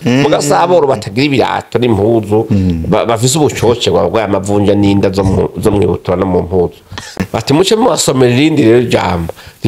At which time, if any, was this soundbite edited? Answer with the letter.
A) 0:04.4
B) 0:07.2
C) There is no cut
B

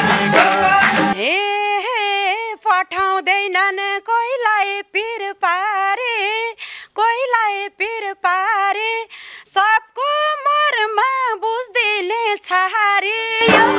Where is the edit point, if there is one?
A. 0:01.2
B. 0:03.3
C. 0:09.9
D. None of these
A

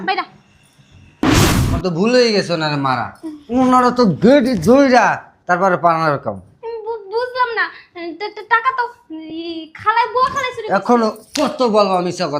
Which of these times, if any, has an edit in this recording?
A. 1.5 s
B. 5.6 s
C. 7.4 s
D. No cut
A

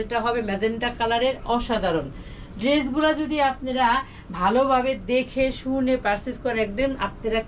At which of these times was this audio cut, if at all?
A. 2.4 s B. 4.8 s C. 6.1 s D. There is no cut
D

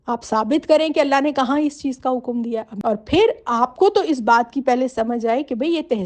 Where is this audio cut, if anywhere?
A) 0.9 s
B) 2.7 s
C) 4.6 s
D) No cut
B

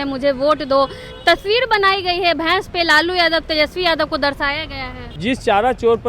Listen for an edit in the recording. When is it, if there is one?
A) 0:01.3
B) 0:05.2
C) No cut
B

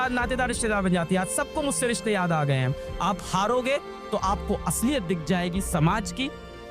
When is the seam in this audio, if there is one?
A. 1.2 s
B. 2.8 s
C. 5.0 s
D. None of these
B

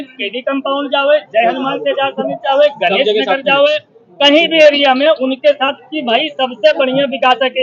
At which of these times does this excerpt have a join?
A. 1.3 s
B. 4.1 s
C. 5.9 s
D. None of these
D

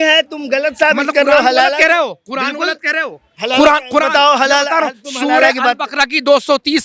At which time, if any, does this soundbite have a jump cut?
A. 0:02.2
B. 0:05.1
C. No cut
C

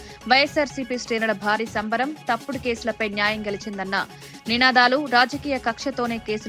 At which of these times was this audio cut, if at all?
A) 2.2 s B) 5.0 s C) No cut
C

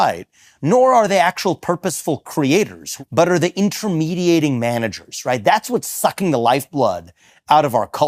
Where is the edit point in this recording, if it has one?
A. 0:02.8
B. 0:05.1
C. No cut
A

